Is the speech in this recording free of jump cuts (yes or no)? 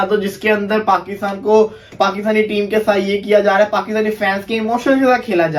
yes